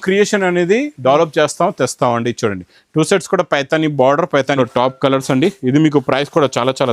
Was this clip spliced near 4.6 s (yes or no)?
yes